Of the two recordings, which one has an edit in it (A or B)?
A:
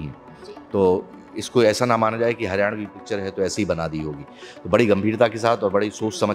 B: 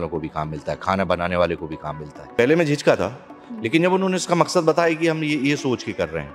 B